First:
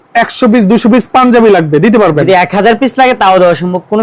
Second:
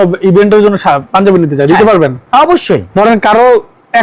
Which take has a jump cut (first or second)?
second